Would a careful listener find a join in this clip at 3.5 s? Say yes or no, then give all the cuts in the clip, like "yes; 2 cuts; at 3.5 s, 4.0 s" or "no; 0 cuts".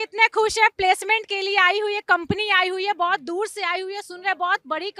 no; 0 cuts